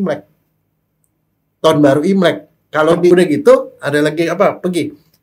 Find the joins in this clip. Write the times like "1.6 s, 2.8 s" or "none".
3.1 s